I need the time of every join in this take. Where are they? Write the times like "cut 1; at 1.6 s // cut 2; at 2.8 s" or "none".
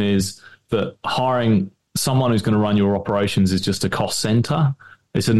none